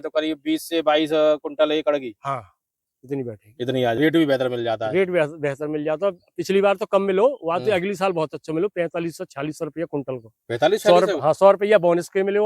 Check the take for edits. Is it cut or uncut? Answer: cut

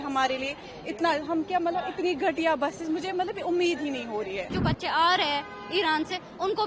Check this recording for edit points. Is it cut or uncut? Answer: cut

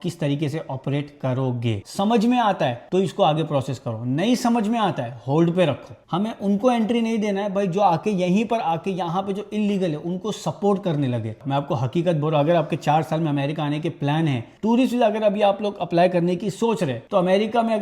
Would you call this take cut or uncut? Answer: cut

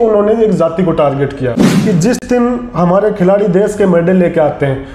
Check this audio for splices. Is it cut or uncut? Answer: cut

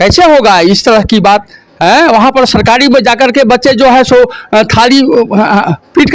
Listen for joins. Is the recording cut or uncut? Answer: uncut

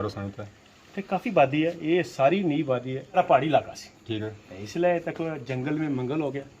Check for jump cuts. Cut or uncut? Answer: cut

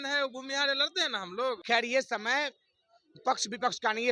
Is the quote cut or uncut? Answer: cut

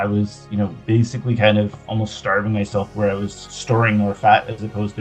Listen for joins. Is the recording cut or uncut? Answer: uncut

